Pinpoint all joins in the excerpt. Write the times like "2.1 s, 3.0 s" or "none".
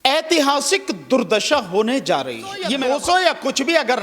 2.7 s